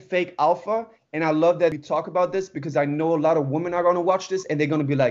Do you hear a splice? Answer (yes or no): yes